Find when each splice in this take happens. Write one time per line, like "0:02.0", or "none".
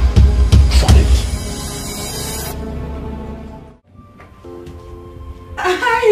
0:03.6

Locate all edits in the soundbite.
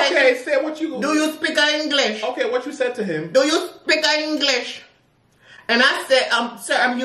none

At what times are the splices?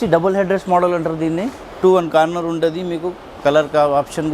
0:01.8

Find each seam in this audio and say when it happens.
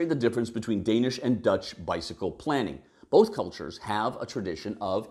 none

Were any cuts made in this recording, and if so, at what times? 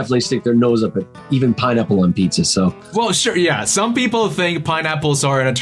0:02.8

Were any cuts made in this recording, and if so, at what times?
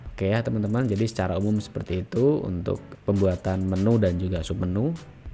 0:02.9

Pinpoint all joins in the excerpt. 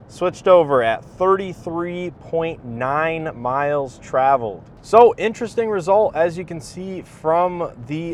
none

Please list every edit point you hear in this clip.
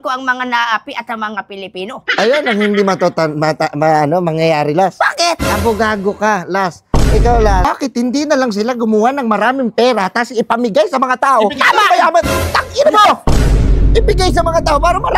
0:07.7

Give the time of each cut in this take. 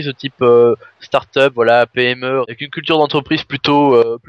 0:02.5

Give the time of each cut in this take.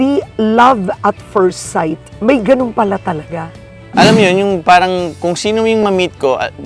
0:03.8

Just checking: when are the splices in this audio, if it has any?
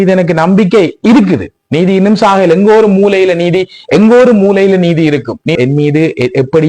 0:05.6

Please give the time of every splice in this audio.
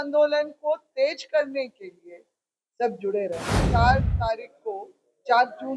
0:03.6

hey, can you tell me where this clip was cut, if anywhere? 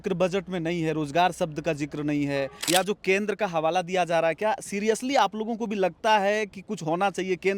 0:02.6

